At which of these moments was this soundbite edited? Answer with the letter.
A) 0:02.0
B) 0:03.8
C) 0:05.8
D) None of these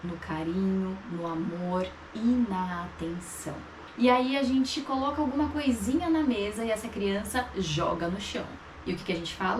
B